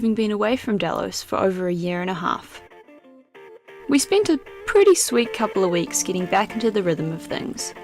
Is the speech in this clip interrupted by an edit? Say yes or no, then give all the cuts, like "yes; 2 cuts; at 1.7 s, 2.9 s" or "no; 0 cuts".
yes; 1 cut; at 6.6 s